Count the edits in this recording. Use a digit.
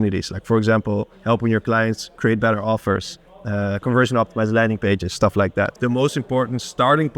1